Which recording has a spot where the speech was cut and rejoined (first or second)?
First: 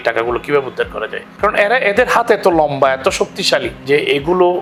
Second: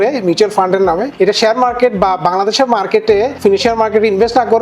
second